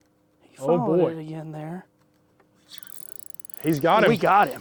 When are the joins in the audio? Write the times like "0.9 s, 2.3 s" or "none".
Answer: none